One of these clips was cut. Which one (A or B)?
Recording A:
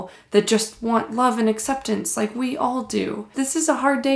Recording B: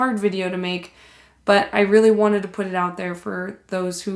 A